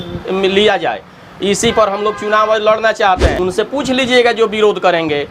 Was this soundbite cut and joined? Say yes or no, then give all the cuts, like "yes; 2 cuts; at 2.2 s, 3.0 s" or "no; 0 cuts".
yes; 1 cut; at 3.4 s